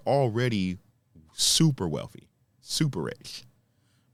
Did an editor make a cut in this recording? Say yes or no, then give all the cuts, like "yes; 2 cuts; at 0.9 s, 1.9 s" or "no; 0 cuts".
no; 0 cuts